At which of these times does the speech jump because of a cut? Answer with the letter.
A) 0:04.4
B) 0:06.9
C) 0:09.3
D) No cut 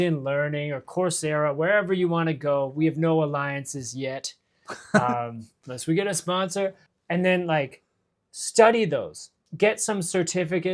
B